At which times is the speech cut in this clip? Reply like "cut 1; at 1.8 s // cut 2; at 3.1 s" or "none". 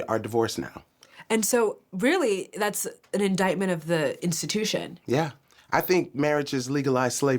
cut 1; at 5.5 s